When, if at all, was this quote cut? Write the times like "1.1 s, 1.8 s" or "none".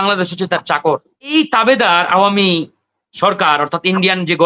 1.3 s